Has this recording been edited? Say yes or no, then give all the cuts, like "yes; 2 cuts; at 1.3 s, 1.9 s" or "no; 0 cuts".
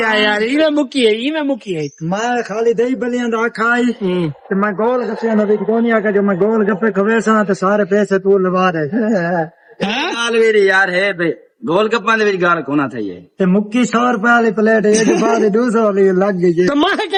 no; 0 cuts